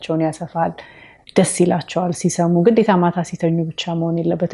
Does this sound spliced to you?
no; 0 cuts

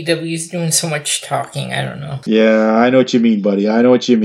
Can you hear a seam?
yes; 1 cut; at 2.1 s

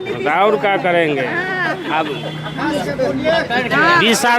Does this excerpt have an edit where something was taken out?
no; 0 cuts

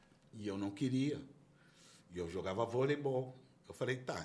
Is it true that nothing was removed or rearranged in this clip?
yes; 0 cuts

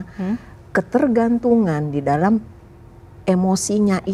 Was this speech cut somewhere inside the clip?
no; 0 cuts

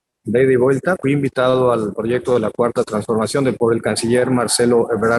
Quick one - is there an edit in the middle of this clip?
yes; 2 cuts; at 1.0 s, 3.6 s

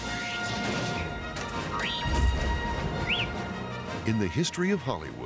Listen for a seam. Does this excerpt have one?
no; 0 cuts

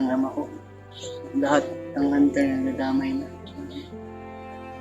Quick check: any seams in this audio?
yes; 1 cut; at 3.9 s

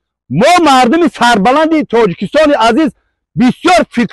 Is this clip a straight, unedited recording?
yes; 0 cuts

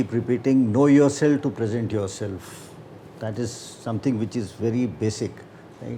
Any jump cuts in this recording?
no; 0 cuts

